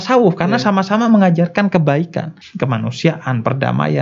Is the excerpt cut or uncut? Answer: cut